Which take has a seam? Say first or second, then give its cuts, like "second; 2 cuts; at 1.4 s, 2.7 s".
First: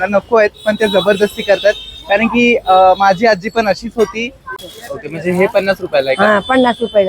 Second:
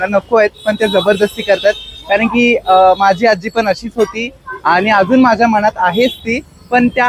first; 1 cut; at 4.5 s